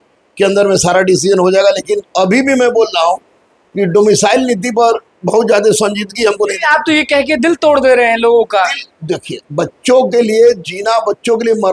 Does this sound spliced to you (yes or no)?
no